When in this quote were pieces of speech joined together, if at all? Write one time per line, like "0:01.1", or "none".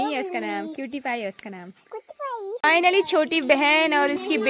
0:02.5